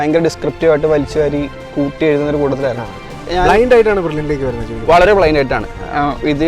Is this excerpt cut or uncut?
cut